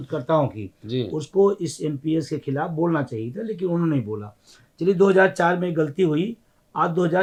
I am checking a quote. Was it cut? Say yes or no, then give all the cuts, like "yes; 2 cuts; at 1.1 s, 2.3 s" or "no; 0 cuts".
no; 0 cuts